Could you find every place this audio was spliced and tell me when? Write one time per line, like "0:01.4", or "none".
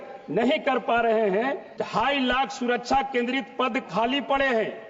0:01.7